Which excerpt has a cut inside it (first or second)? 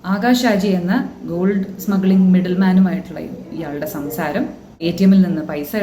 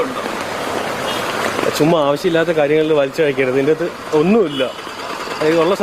first